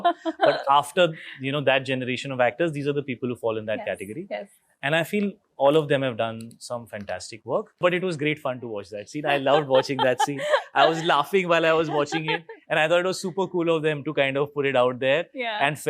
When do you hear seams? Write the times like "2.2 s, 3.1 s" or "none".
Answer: 7.8 s